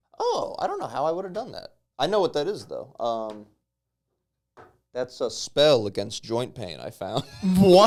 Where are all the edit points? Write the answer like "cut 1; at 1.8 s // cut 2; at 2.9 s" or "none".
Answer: none